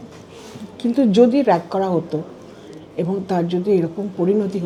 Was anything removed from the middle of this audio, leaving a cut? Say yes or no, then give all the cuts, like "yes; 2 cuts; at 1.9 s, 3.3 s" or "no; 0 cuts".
no; 0 cuts